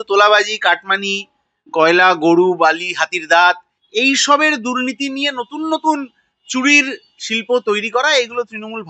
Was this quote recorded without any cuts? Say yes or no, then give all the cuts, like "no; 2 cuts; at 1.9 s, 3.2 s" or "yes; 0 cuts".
yes; 0 cuts